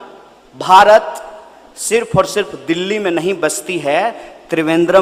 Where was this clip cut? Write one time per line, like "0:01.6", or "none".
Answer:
none